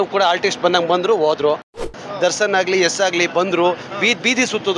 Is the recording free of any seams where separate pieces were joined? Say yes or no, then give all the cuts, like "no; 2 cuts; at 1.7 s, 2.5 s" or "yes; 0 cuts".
no; 1 cut; at 1.9 s